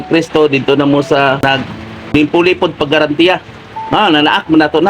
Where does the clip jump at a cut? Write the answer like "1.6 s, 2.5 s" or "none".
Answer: 1.7 s